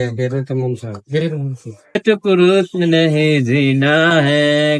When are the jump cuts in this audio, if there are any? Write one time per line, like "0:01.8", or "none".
0:02.0